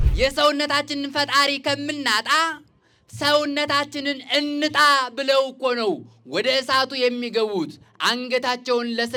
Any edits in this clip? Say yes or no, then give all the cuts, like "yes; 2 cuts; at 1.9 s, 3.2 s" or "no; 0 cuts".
no; 0 cuts